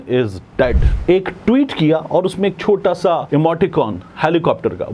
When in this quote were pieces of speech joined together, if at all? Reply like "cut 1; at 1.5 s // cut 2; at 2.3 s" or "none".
cut 1; at 0.9 s // cut 2; at 3.2 s